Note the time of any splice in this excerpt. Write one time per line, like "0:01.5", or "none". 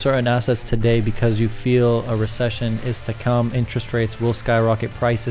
none